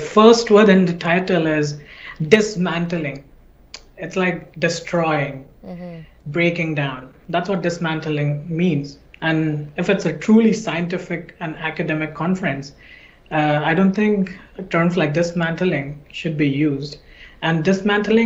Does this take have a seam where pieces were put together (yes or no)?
no